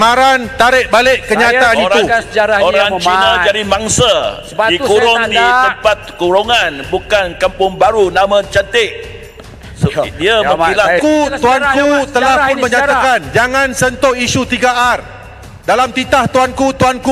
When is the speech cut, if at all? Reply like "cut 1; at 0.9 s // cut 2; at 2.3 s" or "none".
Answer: cut 1; at 11.0 s